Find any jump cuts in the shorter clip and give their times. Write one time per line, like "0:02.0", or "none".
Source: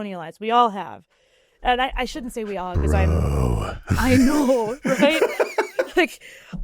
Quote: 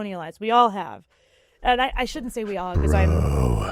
none